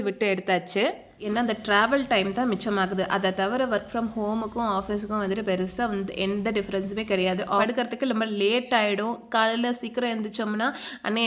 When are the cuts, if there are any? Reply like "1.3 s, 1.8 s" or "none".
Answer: 1.2 s, 7.6 s